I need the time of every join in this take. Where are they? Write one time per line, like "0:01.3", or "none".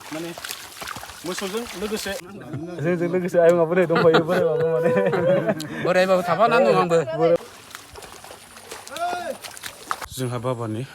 0:02.2
0:07.4
0:10.1